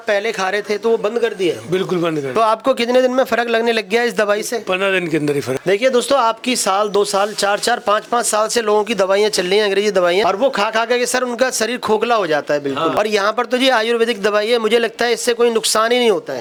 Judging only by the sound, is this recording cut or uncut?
uncut